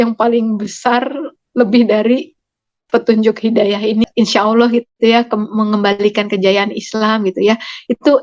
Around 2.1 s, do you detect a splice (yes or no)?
no